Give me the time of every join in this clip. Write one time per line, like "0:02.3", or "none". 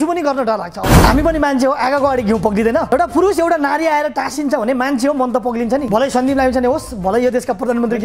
0:00.9
0:02.9
0:05.9